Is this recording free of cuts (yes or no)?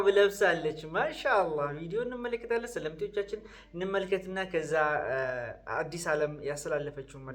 yes